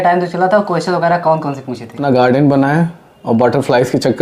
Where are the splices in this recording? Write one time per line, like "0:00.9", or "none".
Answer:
0:02.0